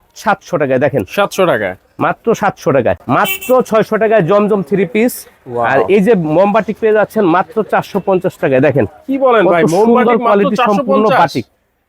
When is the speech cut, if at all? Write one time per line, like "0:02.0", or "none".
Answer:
0:03.0